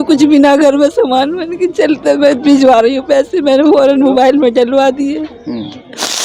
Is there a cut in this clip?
no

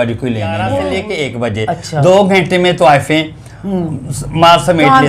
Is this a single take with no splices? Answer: no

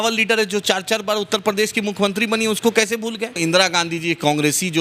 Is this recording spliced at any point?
yes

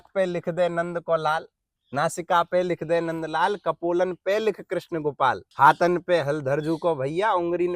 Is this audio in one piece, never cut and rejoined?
no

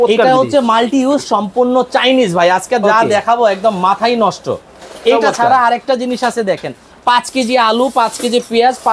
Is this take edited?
no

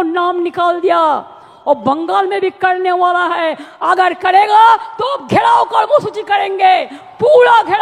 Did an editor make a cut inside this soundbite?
no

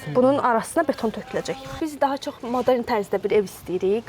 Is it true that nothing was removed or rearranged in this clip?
no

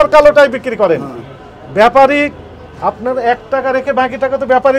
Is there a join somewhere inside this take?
no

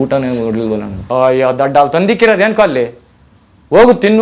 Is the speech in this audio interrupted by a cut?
yes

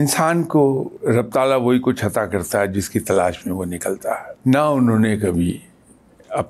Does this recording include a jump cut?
yes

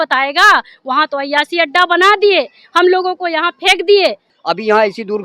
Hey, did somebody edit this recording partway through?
yes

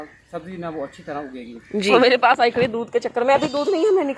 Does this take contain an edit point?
yes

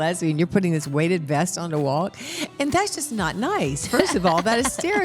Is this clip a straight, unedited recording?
no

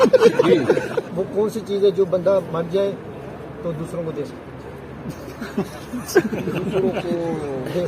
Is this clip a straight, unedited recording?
no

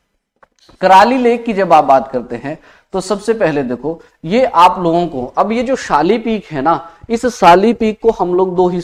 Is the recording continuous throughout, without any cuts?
yes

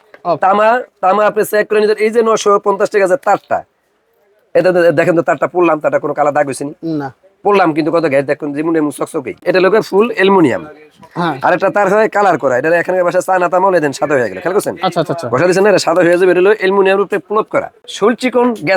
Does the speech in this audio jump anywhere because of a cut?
yes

